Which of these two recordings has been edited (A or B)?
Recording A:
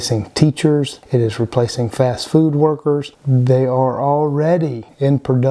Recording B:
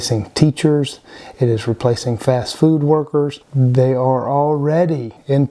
A